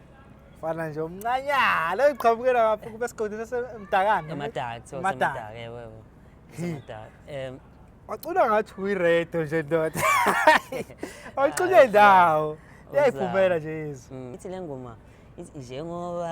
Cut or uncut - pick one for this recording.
cut